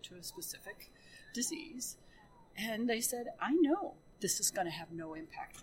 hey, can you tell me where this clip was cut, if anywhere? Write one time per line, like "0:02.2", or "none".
0:04.0